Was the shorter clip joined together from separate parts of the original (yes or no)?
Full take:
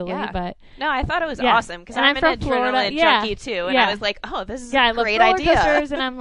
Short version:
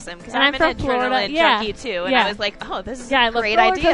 no